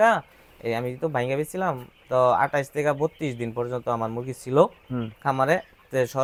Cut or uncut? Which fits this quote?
uncut